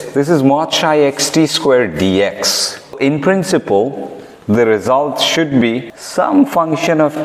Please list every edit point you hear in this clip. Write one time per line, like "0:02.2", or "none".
0:03.0
0:06.0